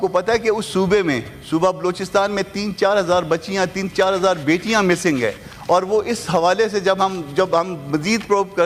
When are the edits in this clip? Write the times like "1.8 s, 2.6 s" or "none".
none